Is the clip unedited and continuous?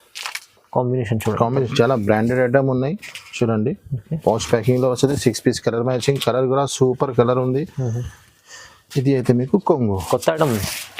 no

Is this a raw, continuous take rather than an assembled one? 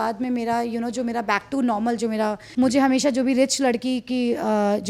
no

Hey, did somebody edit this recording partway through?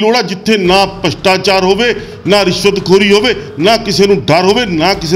no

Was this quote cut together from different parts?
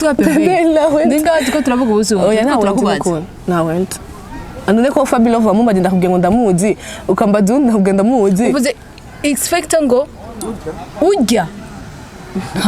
no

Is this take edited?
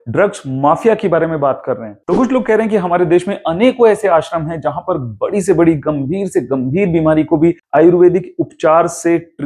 no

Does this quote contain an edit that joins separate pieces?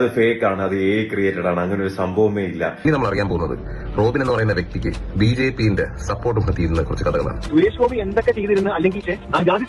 yes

